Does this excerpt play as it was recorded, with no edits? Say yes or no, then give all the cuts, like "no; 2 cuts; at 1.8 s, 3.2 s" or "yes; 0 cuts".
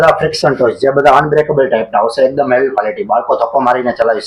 yes; 0 cuts